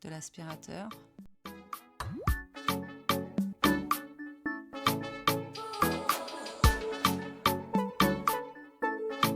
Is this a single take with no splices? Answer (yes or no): yes